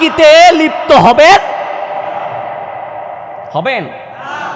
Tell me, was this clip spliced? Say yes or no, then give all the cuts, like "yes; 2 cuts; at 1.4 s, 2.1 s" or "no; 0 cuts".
no; 0 cuts